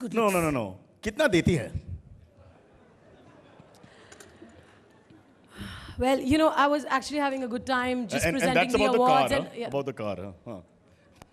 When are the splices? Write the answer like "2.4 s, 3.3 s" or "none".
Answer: none